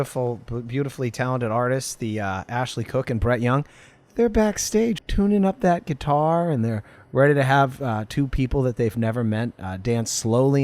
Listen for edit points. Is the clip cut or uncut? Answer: cut